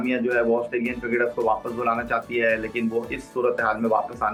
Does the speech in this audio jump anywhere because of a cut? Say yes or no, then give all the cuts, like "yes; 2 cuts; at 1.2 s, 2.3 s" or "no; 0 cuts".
no; 0 cuts